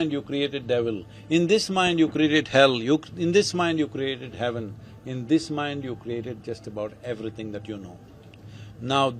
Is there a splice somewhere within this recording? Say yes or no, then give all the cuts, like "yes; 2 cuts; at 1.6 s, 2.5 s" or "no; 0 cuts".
no; 0 cuts